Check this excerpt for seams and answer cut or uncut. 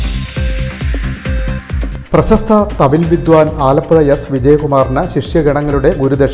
cut